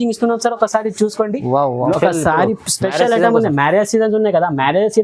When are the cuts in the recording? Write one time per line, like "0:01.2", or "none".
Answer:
0:02.0